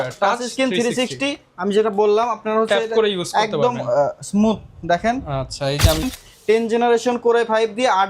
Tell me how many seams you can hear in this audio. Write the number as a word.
one